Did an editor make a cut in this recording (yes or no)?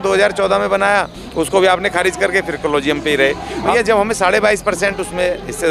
yes